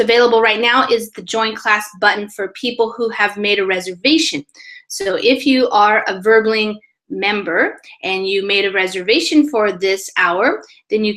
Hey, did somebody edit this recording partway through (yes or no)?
yes